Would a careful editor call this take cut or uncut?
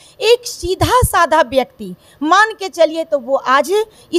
uncut